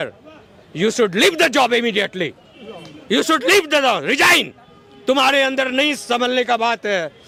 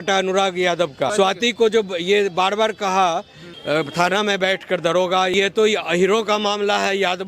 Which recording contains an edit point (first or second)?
second